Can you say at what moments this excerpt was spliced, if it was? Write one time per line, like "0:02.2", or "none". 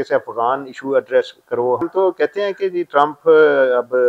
0:01.8